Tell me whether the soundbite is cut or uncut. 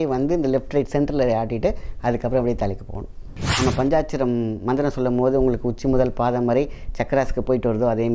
cut